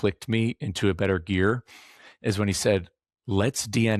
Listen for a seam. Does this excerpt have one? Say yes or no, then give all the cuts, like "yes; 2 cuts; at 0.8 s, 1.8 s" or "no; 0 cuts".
no; 0 cuts